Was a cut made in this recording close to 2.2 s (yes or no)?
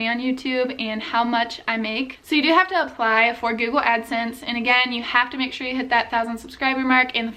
yes